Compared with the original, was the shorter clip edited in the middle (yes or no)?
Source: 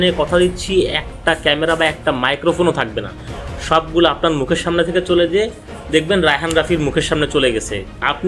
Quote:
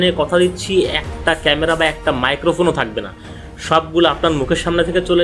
no